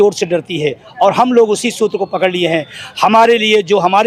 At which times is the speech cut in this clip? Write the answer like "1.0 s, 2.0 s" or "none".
none